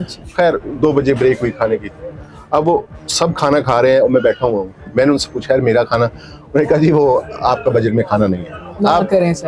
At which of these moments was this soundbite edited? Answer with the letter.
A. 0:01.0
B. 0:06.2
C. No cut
C